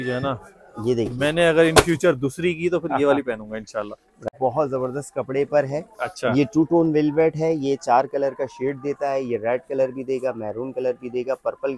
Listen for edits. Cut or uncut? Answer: cut